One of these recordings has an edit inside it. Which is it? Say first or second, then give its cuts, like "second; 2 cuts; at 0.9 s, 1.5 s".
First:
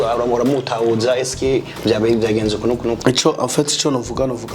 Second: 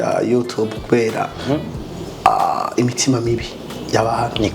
first; 1 cut; at 3.0 s